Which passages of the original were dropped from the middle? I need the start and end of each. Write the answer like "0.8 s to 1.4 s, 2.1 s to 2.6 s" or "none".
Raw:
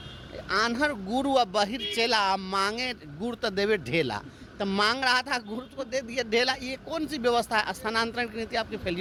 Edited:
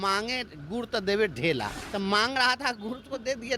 4.3 s to 4.4 s